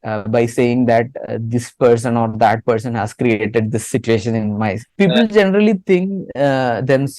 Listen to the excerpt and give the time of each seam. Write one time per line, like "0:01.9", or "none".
0:04.9